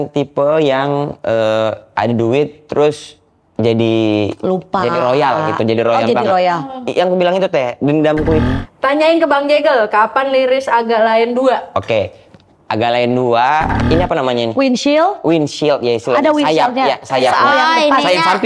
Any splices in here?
yes; 2 cuts; at 8.4 s, 13.8 s

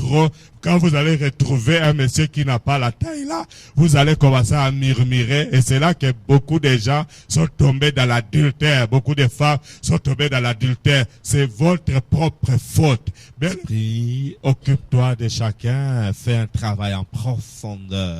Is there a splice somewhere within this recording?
yes; 1 cut; at 13.5 s

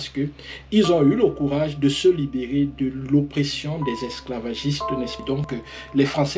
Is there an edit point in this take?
yes; 1 cut; at 5.4 s

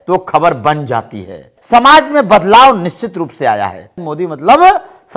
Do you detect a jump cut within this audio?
yes; 2 cuts; at 1.5 s, 4.1 s

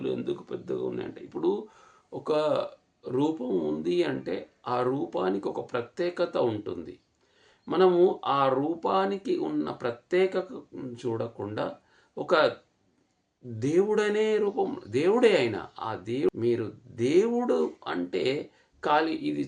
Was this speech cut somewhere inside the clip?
yes; 1 cut; at 16.3 s

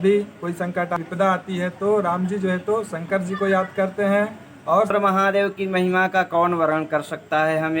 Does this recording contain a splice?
yes; 2 cuts; at 1.0 s, 4.9 s

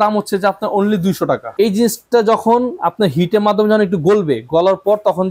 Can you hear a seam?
yes; 1 cut; at 1.5 s

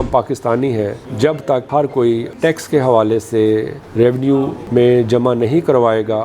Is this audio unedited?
no; 1 cut; at 2.3 s

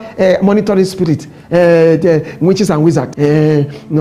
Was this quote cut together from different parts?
yes; 1 cut; at 3.1 s

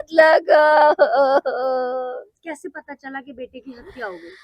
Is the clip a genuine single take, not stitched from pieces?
yes; 0 cuts

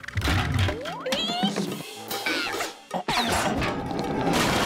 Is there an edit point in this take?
no; 0 cuts

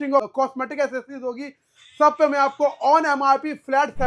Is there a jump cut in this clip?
no; 0 cuts

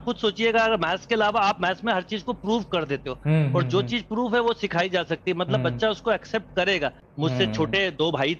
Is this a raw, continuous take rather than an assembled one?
no; 1 cut; at 7.0 s

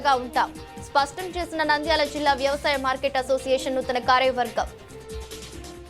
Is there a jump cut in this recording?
yes; 1 cut; at 4.7 s

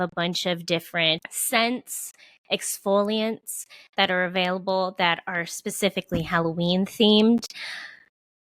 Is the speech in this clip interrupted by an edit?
yes; 1 cut; at 1.3 s

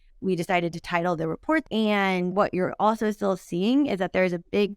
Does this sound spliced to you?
yes; 1 cut; at 1.6 s

